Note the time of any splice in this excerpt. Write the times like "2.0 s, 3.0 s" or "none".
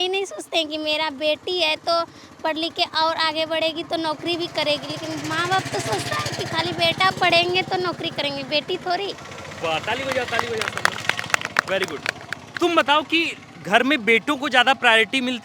none